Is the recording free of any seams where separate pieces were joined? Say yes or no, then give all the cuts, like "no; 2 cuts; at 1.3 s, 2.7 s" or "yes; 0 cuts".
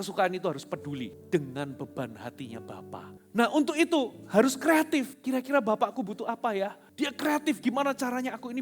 no; 4 cuts; at 1.2 s, 3.2 s, 5.2 s, 6.8 s